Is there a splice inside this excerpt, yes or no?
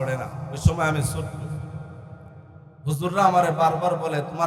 no